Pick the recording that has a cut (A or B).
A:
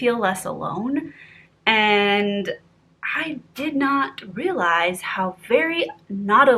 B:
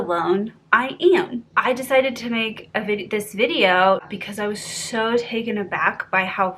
B